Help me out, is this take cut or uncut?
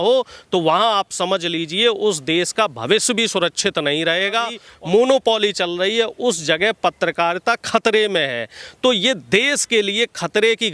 cut